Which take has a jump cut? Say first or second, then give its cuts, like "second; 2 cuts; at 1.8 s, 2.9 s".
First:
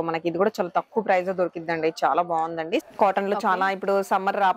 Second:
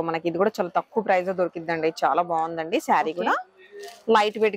first; 1 cut; at 2.8 s